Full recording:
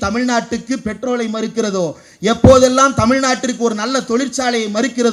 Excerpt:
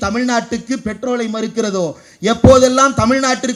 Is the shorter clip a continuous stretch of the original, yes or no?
yes